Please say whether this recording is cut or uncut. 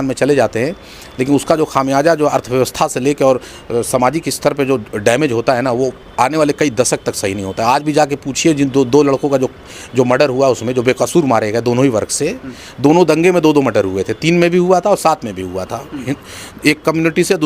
uncut